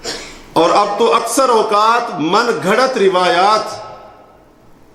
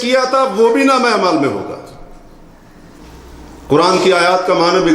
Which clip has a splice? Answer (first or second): second